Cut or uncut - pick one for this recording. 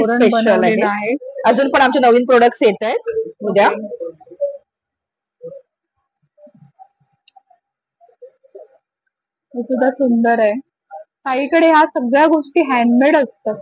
uncut